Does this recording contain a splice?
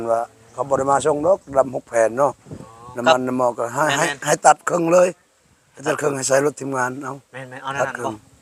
no; 0 cuts

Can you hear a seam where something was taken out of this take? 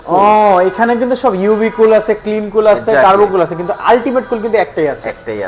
no; 0 cuts

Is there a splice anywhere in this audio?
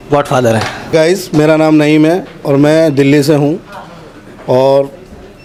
no; 0 cuts

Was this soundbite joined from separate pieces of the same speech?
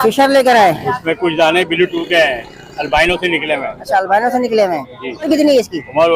yes; 1 cut; at 5.3 s

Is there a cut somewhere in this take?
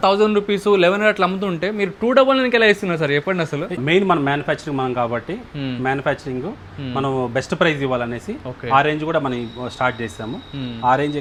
no; 0 cuts

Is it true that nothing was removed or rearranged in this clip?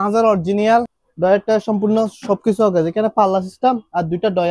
no; 1 cut; at 1.0 s

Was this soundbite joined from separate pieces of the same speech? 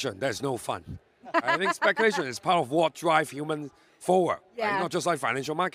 no; 0 cuts

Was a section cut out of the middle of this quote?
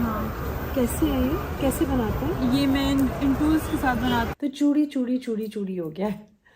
yes; 1 cut; at 4.3 s

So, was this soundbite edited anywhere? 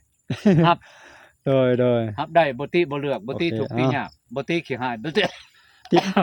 no; 0 cuts

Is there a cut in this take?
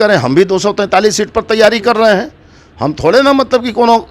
no; 0 cuts

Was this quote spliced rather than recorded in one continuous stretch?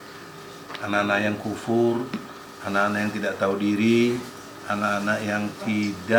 no; 0 cuts

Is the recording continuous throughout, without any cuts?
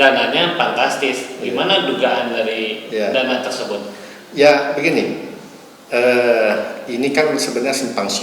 yes; 0 cuts

